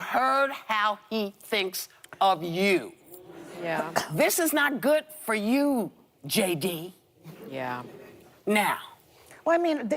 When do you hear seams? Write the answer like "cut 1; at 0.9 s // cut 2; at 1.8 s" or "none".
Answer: cut 1; at 4.0 s